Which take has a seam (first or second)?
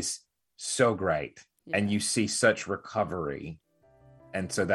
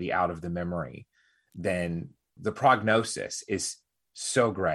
second